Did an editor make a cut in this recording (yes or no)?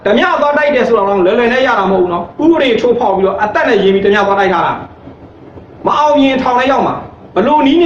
no